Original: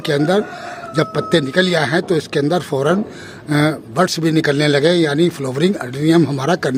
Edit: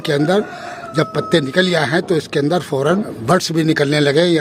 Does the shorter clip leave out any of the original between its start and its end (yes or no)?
yes